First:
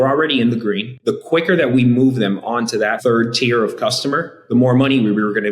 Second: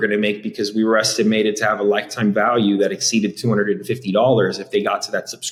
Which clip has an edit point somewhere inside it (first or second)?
first